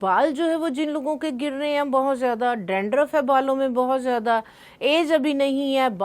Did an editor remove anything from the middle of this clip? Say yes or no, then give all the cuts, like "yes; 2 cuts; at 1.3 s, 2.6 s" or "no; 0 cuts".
no; 0 cuts